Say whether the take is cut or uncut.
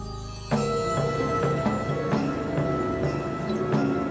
uncut